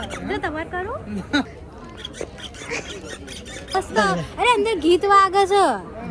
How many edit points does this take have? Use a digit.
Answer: 2